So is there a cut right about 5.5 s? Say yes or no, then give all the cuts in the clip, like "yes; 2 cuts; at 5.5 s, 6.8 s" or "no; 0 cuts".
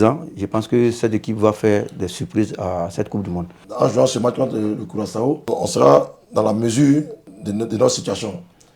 yes; 3 cuts; at 3.6 s, 5.5 s, 7.3 s